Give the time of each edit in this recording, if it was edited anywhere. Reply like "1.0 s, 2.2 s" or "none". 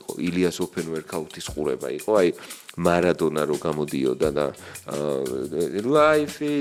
none

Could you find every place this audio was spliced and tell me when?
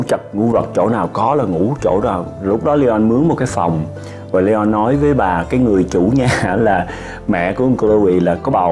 none

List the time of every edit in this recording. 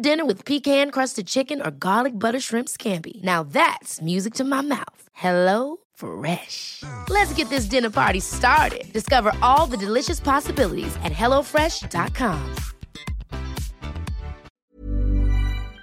14.5 s

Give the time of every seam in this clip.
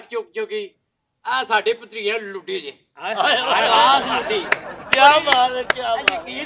none

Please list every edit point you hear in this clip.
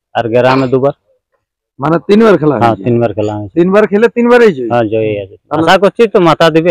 5.6 s

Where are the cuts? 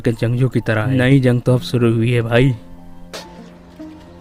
none

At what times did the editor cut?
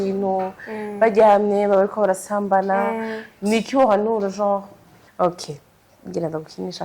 5.0 s

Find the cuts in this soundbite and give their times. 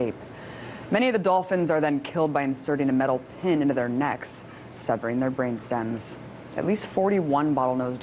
6.4 s

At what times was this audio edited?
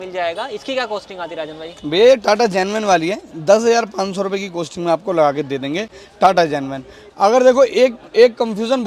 none

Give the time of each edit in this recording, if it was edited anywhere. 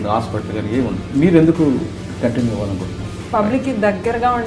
1.0 s, 3.2 s

